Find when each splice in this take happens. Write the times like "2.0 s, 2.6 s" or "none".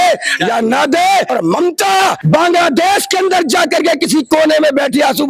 1.3 s, 2.2 s